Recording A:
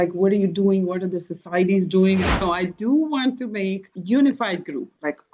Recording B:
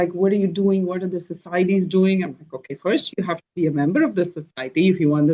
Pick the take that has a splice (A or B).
A